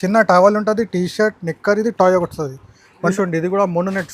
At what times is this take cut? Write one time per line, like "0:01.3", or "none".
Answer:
0:03.1